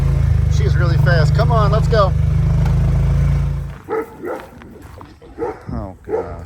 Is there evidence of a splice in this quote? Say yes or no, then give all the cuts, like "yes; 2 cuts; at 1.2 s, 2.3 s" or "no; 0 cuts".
yes; 1 cut; at 3.6 s